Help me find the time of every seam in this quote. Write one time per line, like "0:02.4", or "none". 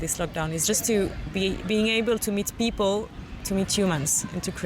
0:03.2